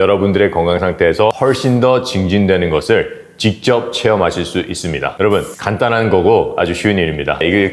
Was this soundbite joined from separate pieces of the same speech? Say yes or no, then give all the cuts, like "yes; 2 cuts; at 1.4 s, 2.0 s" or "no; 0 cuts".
yes; 1 cut; at 1.4 s